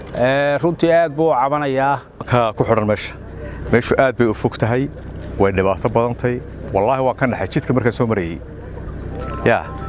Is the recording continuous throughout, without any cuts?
no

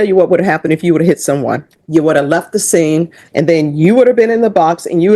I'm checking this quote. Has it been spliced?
yes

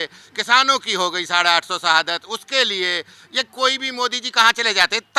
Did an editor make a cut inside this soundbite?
no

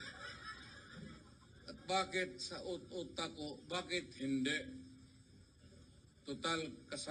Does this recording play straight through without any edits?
no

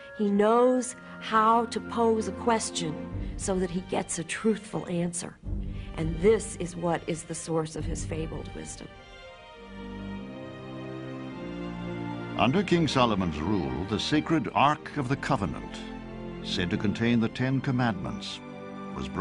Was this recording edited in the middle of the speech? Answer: yes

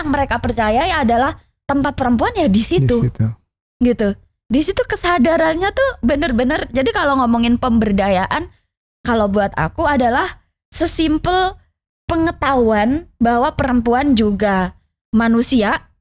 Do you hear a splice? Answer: no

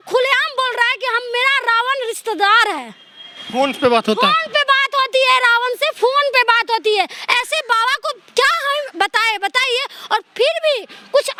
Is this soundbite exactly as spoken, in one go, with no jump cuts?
yes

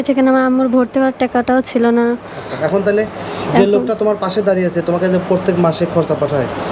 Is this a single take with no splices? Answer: yes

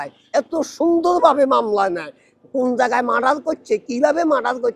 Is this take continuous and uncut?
yes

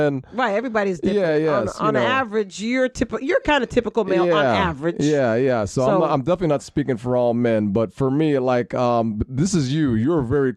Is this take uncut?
yes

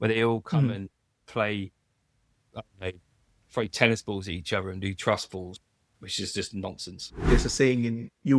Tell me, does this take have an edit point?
yes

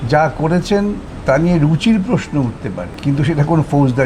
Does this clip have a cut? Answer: yes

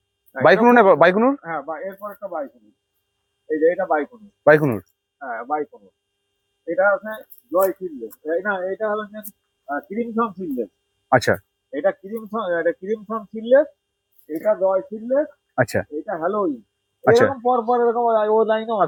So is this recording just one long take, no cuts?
yes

